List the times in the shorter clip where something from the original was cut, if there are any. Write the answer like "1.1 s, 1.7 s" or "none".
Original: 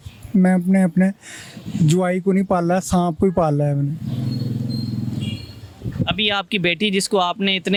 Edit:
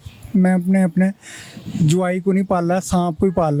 none